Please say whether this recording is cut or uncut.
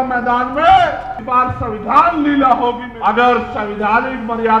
cut